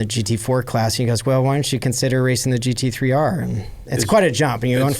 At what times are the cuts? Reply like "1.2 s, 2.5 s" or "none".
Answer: 3.8 s